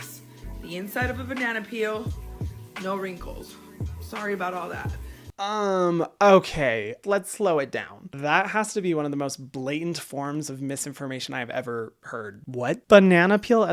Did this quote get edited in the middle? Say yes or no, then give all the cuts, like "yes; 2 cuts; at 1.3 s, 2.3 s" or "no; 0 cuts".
no; 0 cuts